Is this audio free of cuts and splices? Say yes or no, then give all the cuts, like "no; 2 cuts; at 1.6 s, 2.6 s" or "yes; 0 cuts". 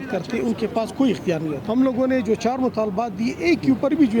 no; 1 cut; at 1.6 s